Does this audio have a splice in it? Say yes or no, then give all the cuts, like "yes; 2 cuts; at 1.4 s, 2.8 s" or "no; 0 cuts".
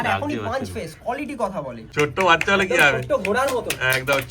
yes; 1 cut; at 1.8 s